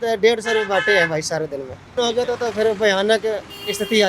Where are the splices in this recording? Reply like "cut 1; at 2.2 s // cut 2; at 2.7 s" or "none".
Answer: cut 1; at 2.0 s